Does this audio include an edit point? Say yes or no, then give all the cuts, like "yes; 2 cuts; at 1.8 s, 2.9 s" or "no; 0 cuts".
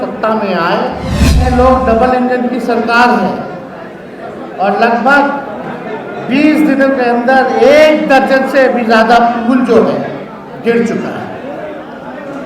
yes; 1 cut; at 1.4 s